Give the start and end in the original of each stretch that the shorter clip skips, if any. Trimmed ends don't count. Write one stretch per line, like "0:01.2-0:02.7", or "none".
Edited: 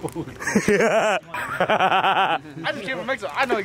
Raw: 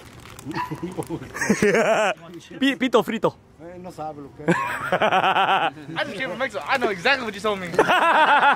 0:02.4-0:04.7